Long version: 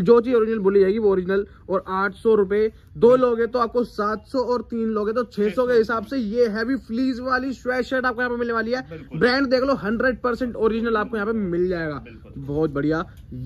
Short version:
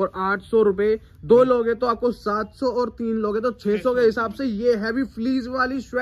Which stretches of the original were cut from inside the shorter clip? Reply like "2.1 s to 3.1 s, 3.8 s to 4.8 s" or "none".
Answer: none